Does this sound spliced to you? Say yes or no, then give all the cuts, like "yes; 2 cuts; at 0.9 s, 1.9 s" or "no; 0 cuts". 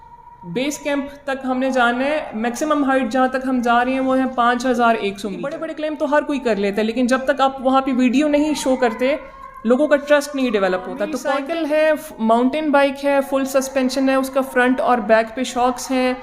yes; 2 cuts; at 5.6 s, 11.0 s